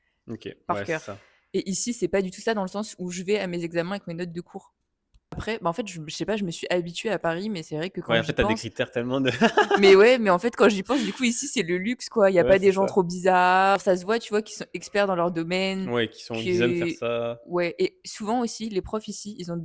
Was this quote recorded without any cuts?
no; 2 cuts; at 5.4 s, 13.8 s

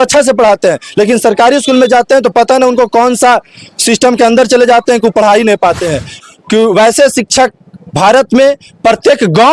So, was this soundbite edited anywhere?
yes; 1 cut; at 6.1 s

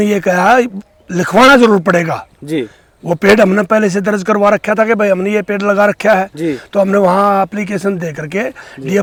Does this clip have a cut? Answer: no; 0 cuts

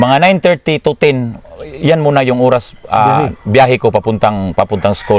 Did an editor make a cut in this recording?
no; 0 cuts

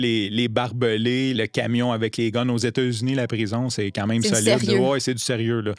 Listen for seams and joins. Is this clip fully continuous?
no; 1 cut; at 1.4 s

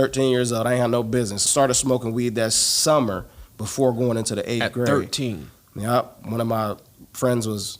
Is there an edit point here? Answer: yes; 1 cut; at 1.4 s

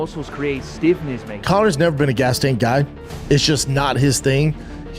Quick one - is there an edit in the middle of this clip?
yes; 1 cut; at 1.3 s

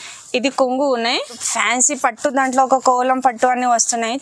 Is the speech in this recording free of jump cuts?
no; 1 cut; at 1.5 s

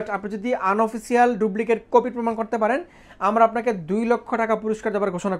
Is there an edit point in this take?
no; 0 cuts

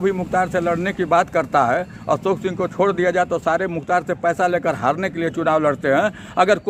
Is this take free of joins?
yes; 0 cuts

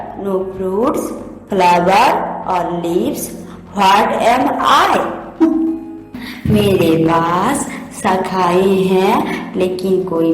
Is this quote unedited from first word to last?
no; 1 cut; at 5.2 s

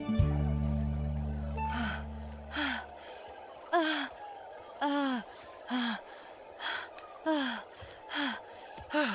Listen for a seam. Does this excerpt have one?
no; 0 cuts

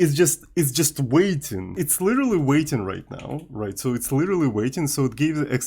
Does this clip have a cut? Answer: yes; 1 cut; at 1.7 s

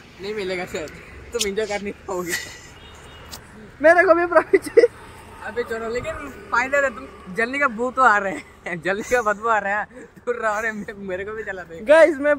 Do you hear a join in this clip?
no; 0 cuts

